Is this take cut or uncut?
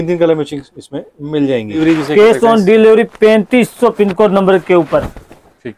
cut